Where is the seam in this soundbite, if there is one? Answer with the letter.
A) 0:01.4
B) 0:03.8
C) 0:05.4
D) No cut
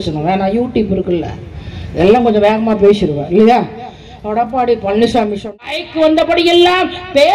C